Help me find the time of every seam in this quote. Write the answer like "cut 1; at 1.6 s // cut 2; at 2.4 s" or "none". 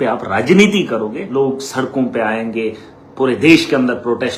cut 1; at 1.2 s